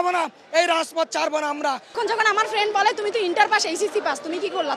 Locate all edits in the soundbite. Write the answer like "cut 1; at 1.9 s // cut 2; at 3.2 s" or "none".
cut 1; at 2.0 s